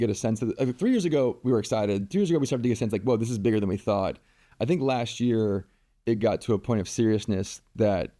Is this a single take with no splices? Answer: yes; 0 cuts

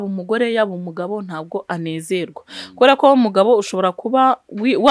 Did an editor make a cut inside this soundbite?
no; 0 cuts

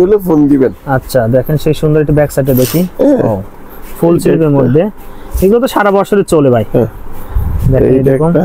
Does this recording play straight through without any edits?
yes; 0 cuts

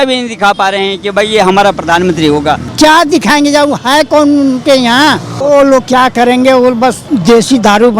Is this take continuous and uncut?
no; 3 cuts; at 2.7 s, 5.4 s, 7.0 s

